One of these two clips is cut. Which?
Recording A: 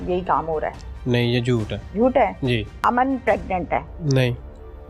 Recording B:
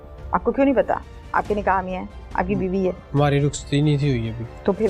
A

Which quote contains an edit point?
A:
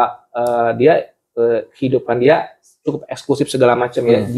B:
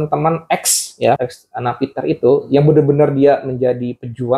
B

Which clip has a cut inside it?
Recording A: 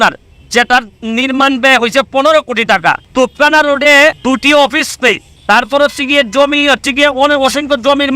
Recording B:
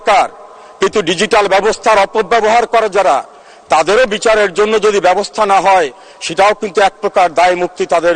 A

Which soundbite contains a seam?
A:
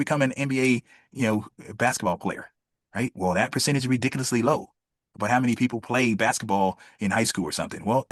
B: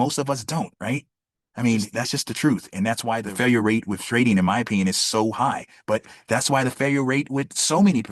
B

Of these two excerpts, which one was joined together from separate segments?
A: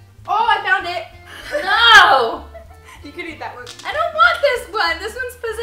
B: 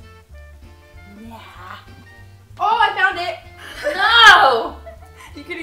B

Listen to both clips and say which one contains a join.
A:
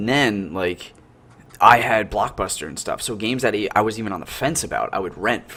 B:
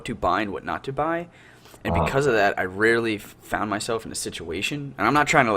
B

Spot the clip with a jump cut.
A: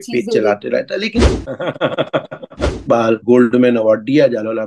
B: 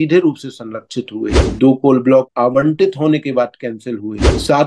A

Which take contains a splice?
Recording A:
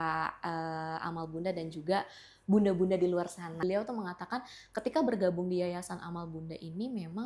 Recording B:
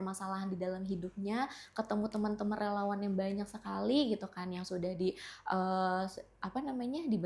A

